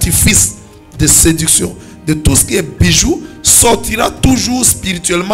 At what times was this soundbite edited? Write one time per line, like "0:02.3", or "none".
none